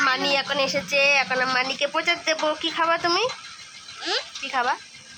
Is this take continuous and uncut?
yes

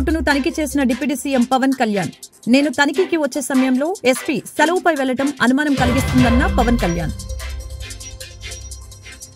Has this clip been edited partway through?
no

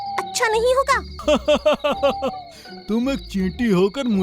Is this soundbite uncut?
no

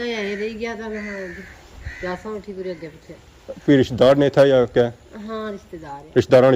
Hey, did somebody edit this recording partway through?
no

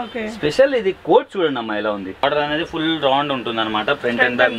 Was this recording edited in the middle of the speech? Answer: yes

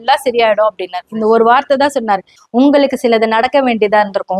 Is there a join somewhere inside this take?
yes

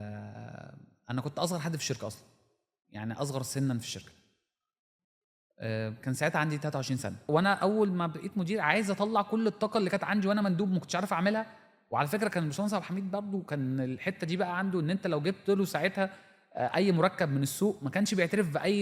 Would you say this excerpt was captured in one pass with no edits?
no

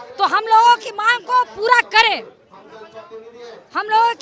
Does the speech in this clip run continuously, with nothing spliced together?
yes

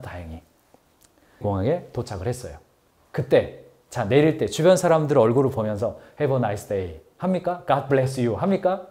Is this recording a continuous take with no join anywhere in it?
no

